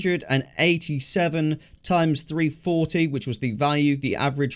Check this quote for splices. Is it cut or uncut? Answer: uncut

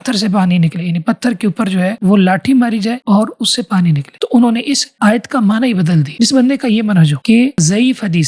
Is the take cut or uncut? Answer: cut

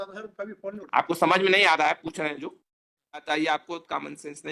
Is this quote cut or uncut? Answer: cut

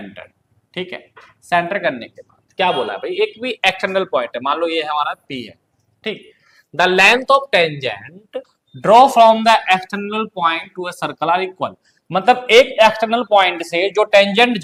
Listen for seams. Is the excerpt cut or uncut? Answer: uncut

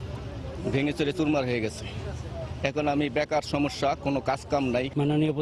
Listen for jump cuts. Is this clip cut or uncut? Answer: uncut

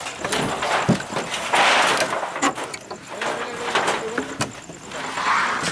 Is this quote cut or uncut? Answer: uncut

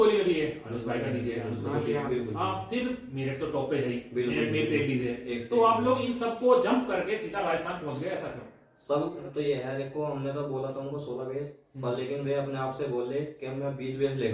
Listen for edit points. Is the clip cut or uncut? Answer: cut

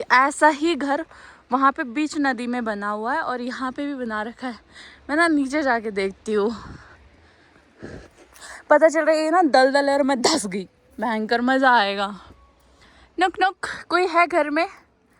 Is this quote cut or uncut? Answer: uncut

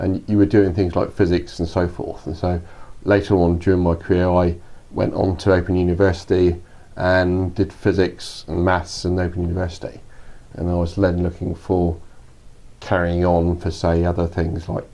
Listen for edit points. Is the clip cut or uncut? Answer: uncut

